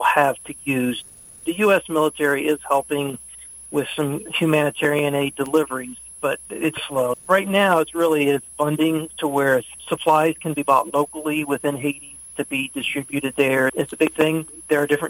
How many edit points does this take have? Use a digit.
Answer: 4